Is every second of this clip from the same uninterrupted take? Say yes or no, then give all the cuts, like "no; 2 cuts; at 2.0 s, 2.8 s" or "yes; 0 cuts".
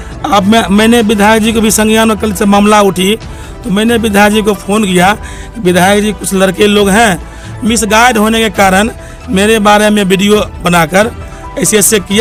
yes; 0 cuts